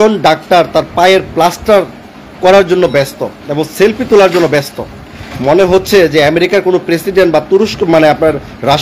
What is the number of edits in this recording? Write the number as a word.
zero